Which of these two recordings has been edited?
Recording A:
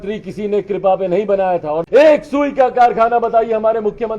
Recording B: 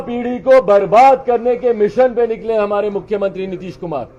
A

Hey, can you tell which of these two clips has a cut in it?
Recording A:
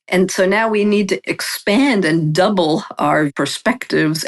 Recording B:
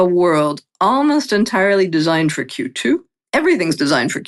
A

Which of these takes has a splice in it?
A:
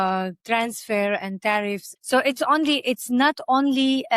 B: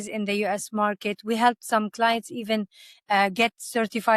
A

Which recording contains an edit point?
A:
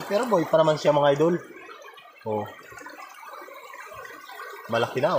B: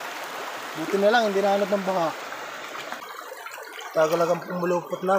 B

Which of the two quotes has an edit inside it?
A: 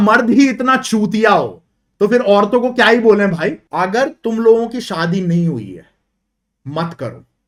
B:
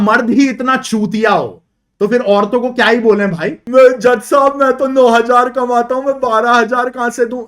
B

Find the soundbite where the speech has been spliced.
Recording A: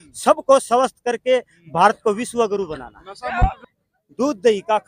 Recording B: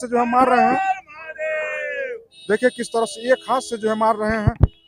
A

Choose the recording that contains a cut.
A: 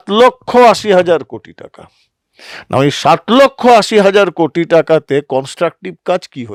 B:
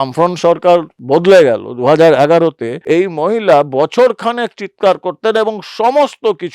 B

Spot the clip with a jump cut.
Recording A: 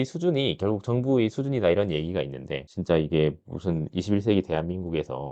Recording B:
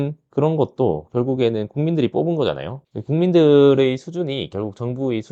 A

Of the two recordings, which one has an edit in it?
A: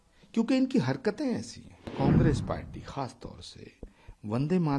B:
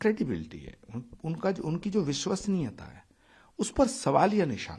A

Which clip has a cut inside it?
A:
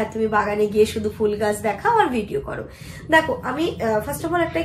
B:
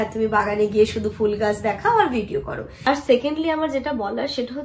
B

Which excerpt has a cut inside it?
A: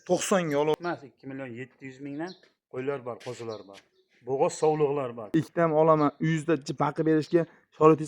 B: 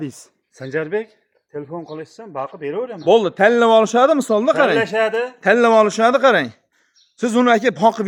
A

